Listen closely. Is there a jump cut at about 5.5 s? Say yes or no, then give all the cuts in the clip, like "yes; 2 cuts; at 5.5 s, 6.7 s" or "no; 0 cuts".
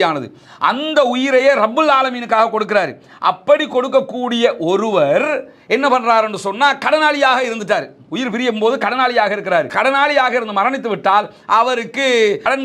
no; 1 cut; at 9.7 s